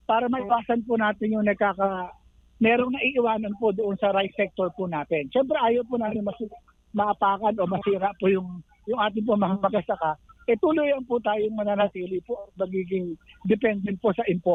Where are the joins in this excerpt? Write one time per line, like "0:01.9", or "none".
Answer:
none